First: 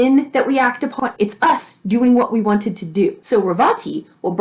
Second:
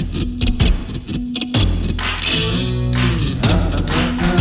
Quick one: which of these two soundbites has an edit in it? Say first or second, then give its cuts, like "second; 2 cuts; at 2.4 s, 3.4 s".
first; 2 cuts; at 1.0 s, 3.2 s